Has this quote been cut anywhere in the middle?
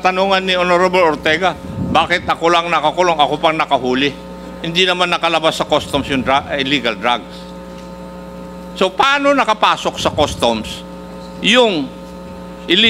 no; 0 cuts

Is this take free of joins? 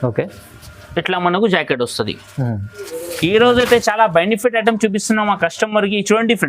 no; 1 cut; at 2.9 s

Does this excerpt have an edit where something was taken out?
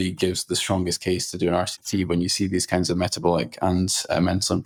no; 0 cuts

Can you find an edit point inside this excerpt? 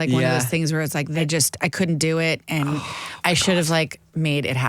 yes; 1 cut; at 1.2 s

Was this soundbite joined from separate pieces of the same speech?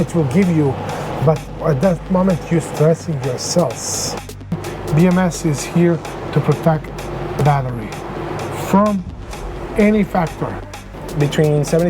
yes; 2 cuts; at 4.5 s, 10.8 s

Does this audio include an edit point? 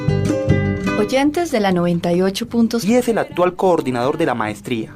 no; 0 cuts

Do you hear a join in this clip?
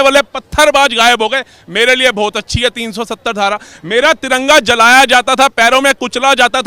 no; 0 cuts

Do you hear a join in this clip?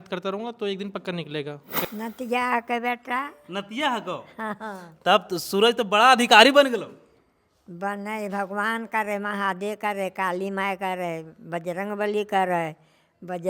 yes; 1 cut; at 1.8 s

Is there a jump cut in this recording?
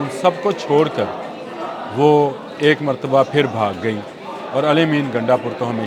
yes; 1 cut; at 1.5 s

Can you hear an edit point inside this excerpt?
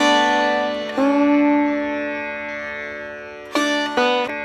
yes; 1 cut; at 0.9 s

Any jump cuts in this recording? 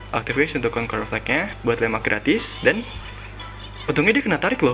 yes; 1 cut; at 1.5 s

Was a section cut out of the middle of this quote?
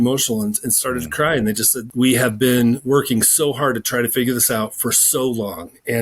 yes; 1 cut; at 1.8 s

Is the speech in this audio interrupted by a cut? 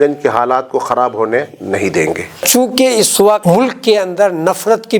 yes; 2 cuts; at 2.3 s, 3.4 s

